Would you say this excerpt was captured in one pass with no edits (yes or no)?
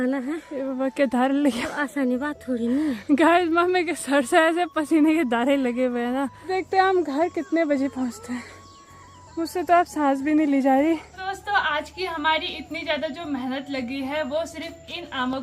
no